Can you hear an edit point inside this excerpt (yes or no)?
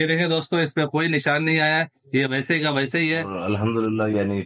yes